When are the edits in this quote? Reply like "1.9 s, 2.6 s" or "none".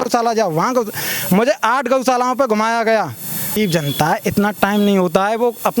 3.5 s